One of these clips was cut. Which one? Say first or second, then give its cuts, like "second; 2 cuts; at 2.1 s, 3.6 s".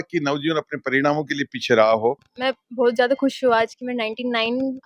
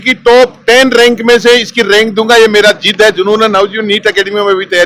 first; 1 cut; at 2.3 s